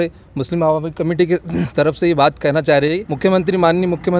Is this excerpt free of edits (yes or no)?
no